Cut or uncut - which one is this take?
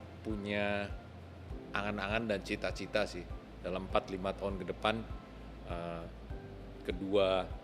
uncut